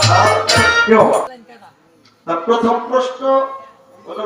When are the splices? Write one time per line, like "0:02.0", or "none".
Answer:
0:01.3

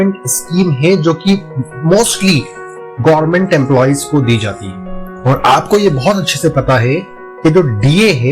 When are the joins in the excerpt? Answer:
0:05.1

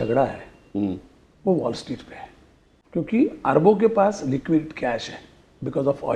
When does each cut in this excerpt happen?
0:02.7

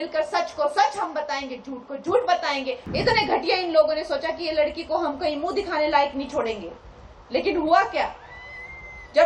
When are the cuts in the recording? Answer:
0:02.8

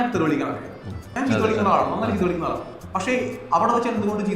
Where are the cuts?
0:01.1

